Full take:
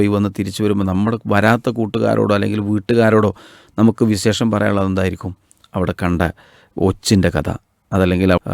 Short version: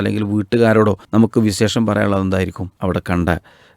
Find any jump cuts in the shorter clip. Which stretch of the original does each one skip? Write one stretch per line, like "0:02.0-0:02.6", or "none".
0:03.4-0:03.7
0:05.3-0:05.6